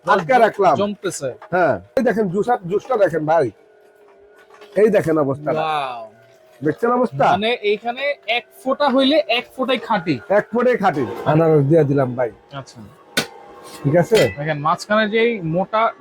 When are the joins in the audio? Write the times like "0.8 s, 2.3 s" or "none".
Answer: 2.0 s, 11.2 s